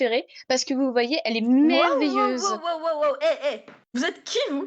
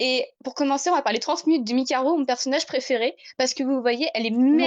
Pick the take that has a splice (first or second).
first